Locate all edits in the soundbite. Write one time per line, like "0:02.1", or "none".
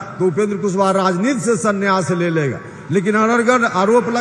none